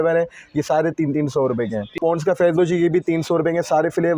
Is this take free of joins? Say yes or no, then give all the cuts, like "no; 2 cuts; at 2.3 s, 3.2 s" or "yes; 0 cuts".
no; 1 cut; at 2.0 s